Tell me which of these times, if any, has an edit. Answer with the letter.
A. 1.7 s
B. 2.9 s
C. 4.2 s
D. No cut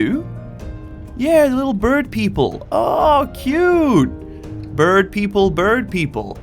D